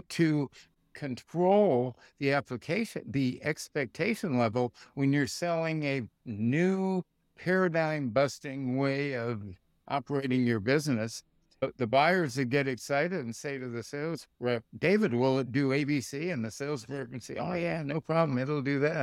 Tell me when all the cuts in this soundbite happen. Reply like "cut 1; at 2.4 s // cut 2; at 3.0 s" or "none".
cut 1; at 11.9 s